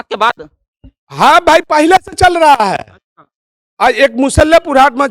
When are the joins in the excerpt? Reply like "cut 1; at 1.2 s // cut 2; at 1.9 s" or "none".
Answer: none